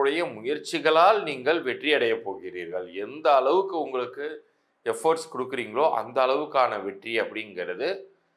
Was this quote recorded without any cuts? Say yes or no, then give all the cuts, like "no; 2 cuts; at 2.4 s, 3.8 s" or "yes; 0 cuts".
yes; 0 cuts